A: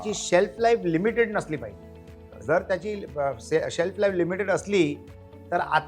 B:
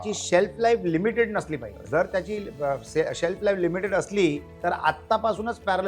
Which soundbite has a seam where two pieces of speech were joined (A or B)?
B